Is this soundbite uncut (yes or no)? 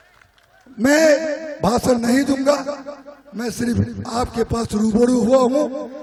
yes